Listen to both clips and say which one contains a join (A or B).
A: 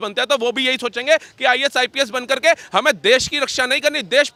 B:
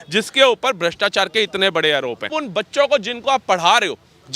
B